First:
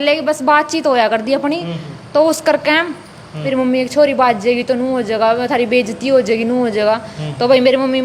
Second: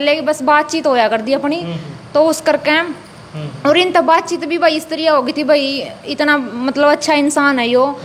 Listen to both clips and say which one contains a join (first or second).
first